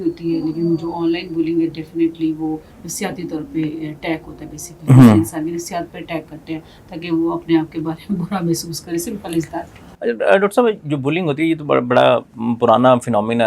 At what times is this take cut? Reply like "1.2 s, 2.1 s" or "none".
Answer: none